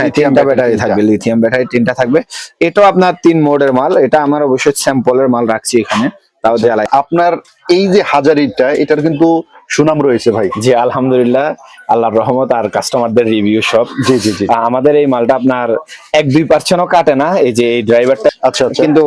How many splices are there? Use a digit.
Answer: 2